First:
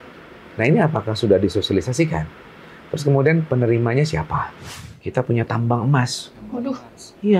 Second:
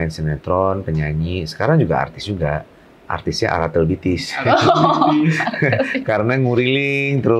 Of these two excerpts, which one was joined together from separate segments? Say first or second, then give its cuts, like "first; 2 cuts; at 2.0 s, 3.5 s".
first; 1 cut; at 5.0 s